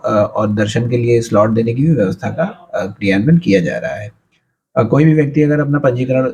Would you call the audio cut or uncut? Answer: uncut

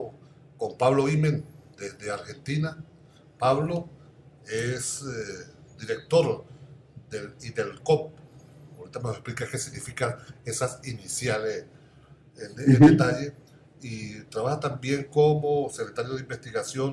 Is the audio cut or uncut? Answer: uncut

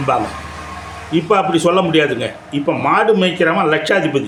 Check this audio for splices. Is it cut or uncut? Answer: uncut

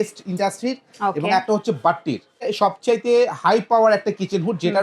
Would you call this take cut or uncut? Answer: cut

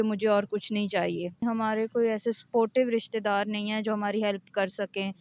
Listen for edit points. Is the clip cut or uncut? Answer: cut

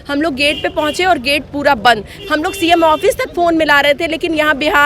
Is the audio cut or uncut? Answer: cut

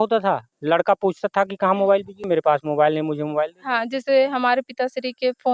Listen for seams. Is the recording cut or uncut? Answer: cut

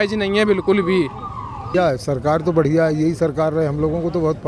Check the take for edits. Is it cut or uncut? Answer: cut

